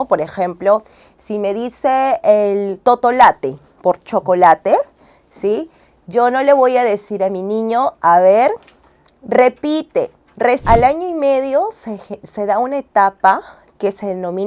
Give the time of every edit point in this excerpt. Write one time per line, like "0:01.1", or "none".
0:10.6